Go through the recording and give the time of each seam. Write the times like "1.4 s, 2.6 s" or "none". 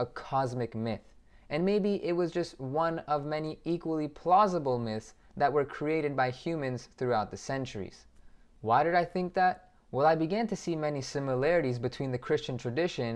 none

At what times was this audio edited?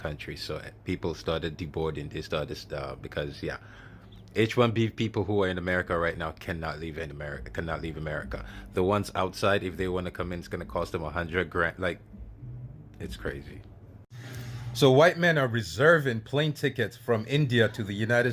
13.9 s

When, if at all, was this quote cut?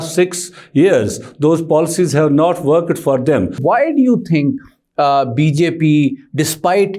3.6 s

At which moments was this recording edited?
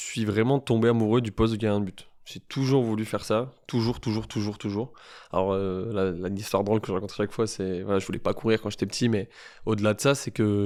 none

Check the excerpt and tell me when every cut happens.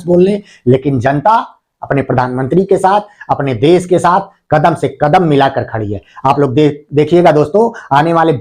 none

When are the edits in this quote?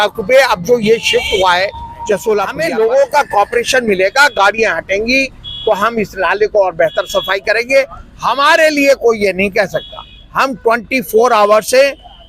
2.6 s

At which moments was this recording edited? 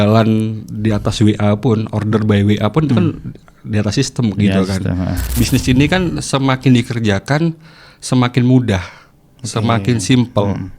5.4 s

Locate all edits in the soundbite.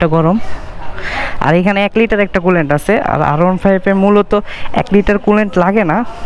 none

